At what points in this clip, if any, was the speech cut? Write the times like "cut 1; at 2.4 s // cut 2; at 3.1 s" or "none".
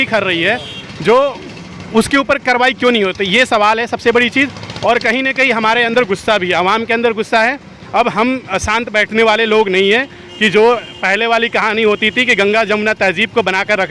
none